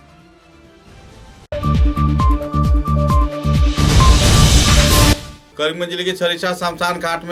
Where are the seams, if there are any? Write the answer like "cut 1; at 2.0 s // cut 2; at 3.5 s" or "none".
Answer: none